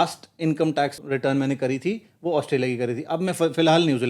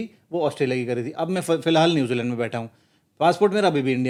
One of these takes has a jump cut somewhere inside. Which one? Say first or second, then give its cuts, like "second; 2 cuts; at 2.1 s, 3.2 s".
first; 1 cut; at 1.0 s